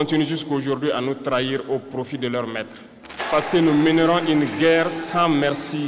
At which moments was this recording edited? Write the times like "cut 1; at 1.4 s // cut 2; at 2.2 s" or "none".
cut 1; at 3.2 s